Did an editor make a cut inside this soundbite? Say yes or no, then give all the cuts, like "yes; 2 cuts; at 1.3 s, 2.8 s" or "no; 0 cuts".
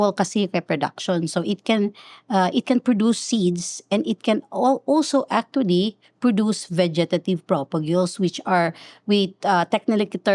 no; 0 cuts